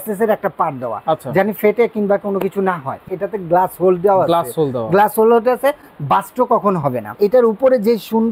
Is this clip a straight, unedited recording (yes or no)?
no